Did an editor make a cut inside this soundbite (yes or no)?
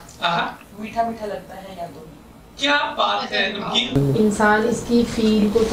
yes